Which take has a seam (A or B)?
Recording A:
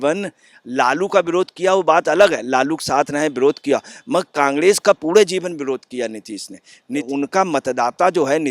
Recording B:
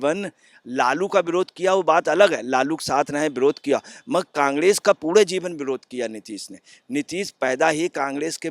A